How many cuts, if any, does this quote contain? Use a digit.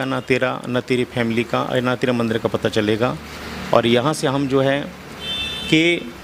0